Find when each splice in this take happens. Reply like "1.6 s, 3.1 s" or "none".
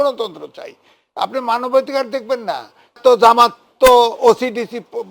3.0 s